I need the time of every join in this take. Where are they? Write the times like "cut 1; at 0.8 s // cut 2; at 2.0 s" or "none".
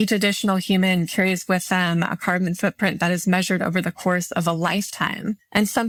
none